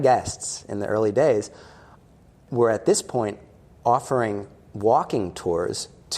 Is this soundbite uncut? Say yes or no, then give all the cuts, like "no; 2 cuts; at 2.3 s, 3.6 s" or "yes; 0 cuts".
no; 1 cut; at 2.4 s